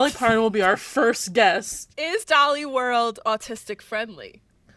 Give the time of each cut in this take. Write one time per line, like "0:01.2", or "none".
0:02.2